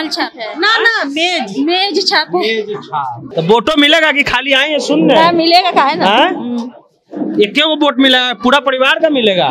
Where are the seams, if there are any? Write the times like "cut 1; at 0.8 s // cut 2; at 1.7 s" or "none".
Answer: cut 1; at 3.2 s